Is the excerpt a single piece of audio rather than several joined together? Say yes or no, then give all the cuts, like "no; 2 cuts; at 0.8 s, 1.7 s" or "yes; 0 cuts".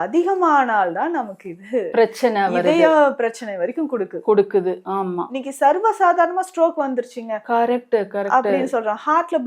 yes; 0 cuts